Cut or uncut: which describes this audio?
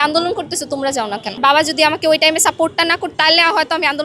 cut